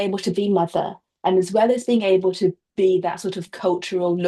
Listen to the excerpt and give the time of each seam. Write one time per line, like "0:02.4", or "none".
none